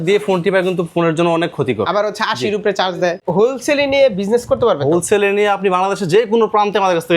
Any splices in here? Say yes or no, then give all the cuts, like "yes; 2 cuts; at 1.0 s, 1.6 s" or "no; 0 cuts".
yes; 1 cut; at 3.2 s